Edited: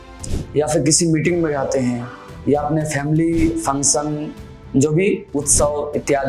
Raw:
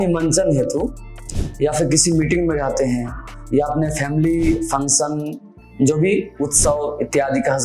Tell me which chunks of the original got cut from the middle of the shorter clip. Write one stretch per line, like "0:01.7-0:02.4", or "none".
none